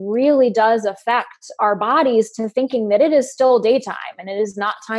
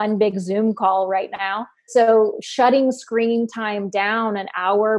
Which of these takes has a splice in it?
second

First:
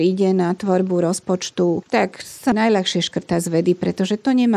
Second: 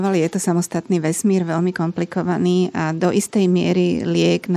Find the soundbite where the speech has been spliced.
first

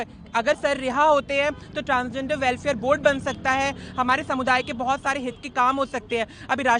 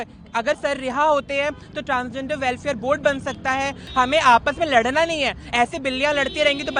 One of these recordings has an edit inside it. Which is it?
second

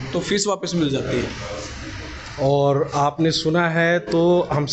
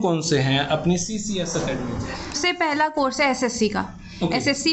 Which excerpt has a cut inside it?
second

